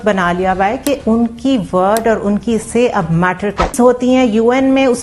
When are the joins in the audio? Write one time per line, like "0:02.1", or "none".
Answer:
0:03.7